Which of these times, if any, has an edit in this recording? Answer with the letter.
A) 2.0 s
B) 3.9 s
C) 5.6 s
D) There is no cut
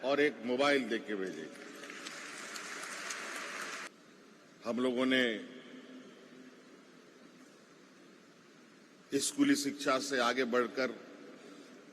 B